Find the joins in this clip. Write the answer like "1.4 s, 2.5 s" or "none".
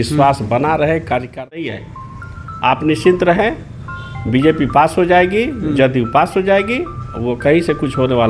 1.6 s

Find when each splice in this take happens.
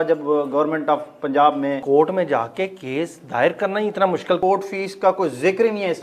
1.8 s, 4.4 s

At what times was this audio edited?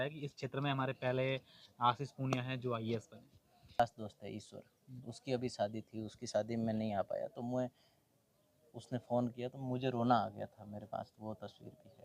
3.8 s

